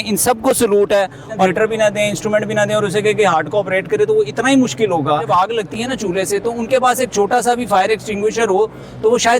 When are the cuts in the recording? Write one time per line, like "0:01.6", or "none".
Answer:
0:01.5
0:05.3